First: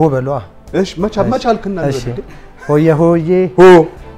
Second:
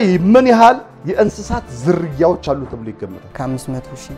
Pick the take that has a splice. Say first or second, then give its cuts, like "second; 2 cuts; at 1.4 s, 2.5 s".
second; 1 cut; at 3.3 s